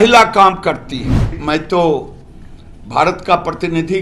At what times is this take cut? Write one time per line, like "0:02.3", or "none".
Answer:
0:01.4